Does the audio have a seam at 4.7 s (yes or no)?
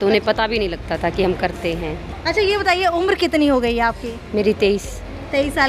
no